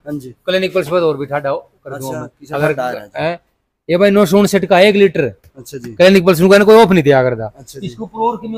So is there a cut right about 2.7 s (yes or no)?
no